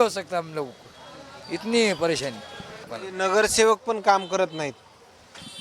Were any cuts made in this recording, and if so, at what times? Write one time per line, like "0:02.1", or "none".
0:02.9